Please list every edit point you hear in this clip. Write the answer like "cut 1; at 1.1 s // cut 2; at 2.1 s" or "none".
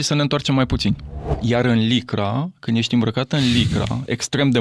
cut 1; at 1.4 s